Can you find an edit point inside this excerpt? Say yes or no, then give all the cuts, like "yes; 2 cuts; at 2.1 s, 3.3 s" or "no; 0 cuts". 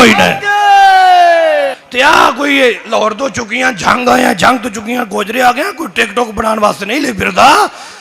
yes; 1 cut; at 1.8 s